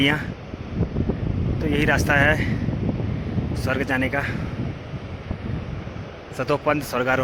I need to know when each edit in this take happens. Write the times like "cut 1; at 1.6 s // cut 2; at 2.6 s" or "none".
none